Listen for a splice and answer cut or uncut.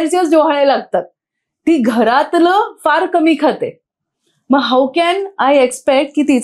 uncut